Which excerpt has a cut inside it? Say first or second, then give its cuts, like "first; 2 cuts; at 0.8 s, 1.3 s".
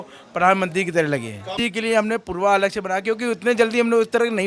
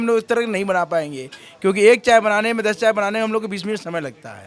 first; 1 cut; at 1.6 s